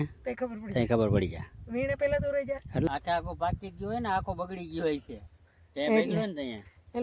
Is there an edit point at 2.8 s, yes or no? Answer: yes